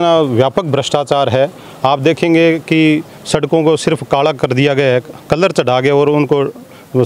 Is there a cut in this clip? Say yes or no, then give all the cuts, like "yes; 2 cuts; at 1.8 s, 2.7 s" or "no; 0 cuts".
no; 0 cuts